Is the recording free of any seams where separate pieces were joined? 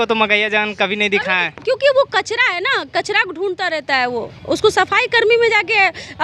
yes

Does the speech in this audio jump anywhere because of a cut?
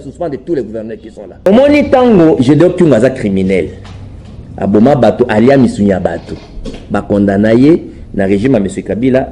yes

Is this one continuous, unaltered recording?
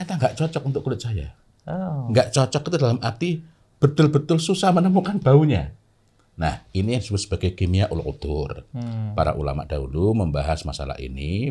yes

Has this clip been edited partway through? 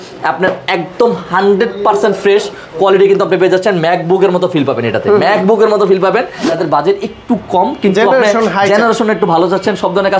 yes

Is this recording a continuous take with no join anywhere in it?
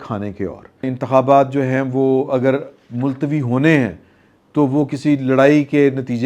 no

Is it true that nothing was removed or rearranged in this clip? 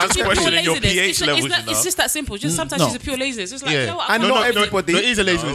yes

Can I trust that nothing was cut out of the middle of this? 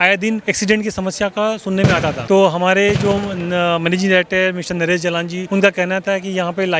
yes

